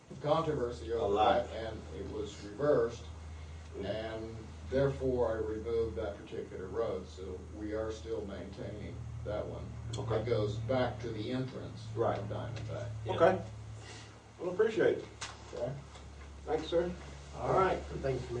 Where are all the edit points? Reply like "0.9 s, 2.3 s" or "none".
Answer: 12.4 s